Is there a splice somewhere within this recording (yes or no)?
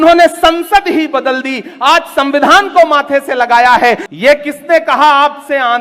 yes